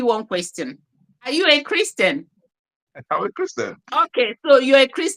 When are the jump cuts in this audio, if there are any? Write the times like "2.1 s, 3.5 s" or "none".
1.3 s, 4.1 s

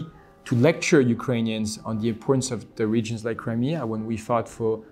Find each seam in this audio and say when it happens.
none

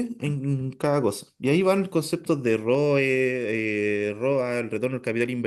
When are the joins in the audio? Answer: none

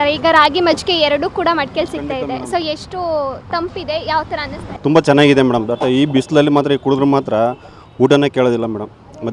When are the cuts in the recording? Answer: 4.7 s

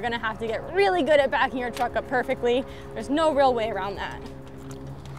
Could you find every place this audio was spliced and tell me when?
none

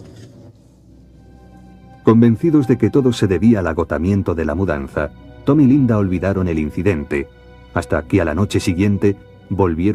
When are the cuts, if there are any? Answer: 0.9 s

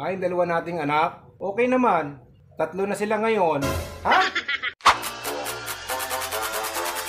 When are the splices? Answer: 4.8 s

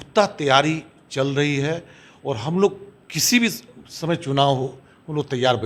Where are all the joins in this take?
none

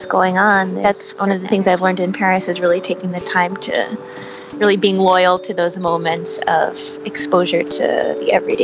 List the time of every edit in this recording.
1.2 s, 4.4 s

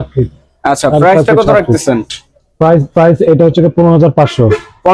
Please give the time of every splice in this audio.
none

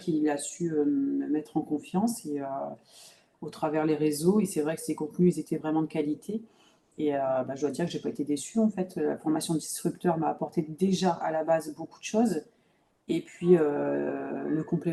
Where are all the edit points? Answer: none

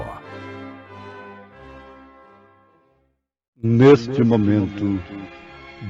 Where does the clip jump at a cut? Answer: 3.6 s

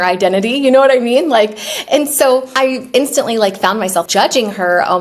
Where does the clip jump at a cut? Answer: none

